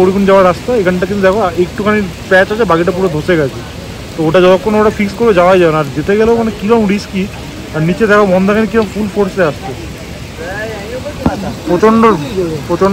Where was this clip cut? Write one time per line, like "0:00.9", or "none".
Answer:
none